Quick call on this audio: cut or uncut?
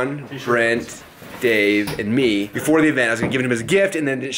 cut